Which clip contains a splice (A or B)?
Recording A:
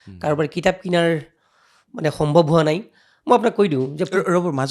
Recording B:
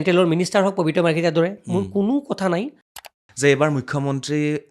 B